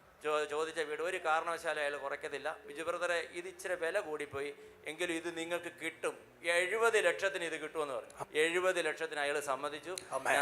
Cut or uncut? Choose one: cut